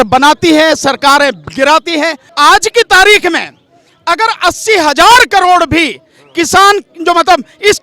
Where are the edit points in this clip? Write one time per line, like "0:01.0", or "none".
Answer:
0:02.2